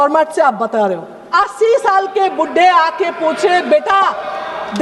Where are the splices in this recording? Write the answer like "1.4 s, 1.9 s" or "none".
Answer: 1.3 s